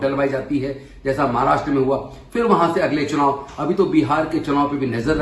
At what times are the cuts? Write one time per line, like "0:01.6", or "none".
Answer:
none